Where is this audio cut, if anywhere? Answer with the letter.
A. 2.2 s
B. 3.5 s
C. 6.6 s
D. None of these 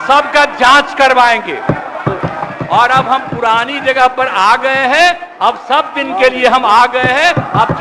A